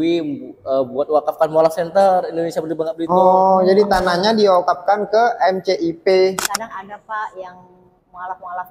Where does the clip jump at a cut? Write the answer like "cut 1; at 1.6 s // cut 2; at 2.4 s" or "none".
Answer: cut 1; at 6.4 s